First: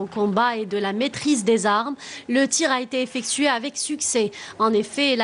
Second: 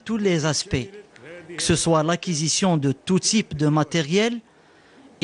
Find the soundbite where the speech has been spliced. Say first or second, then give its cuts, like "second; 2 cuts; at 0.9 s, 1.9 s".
first; 1 cut; at 2.5 s